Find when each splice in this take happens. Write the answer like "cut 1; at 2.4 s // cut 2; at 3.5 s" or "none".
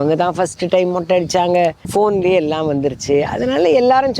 cut 1; at 1.8 s